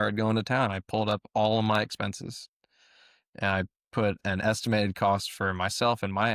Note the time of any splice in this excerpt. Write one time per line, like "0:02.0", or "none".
none